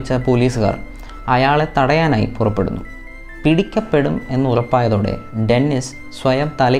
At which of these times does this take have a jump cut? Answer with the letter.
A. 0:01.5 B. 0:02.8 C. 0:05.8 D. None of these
D